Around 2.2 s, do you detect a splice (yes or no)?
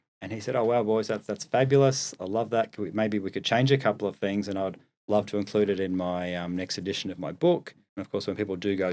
no